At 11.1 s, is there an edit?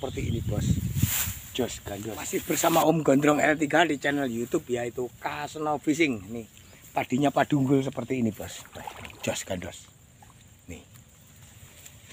no; 1 cut; at 2.4 s

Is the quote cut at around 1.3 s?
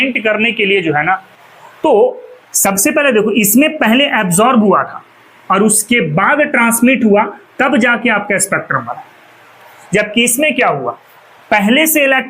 yes; 1 cut; at 1.3 s

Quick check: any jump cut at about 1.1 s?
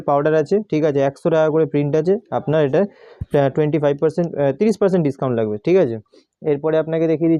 no; 0 cuts

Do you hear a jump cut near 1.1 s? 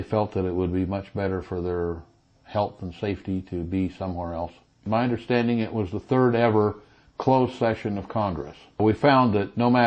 no; 2 cuts; at 4.9 s, 8.8 s

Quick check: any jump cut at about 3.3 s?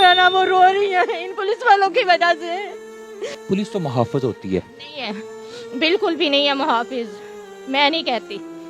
yes; 1 cut; at 3.3 s

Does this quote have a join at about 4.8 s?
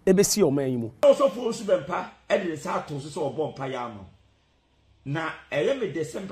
no; 1 cut; at 1.0 s

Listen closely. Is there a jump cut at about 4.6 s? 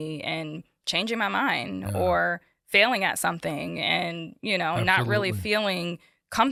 no; 0 cuts

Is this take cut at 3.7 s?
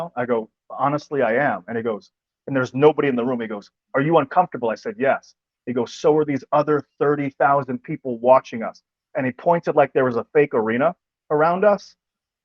yes; 1 cut; at 3.7 s

